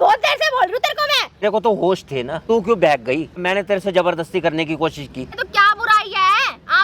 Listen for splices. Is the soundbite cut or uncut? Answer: cut